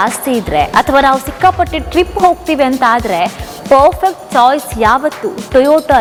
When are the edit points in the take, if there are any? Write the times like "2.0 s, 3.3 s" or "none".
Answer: none